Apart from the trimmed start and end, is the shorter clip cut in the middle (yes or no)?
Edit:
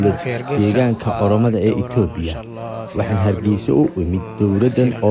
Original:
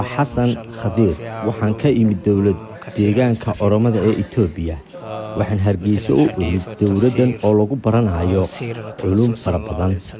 no